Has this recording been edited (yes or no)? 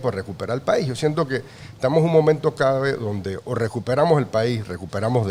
no